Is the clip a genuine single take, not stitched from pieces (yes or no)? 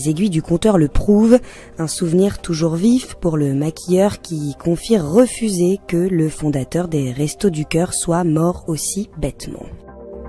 no